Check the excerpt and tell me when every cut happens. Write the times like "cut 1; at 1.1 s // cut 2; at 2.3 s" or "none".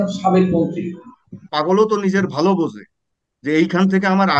cut 1; at 1.5 s